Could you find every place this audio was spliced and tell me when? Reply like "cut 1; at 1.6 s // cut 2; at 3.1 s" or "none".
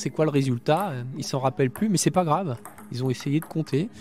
none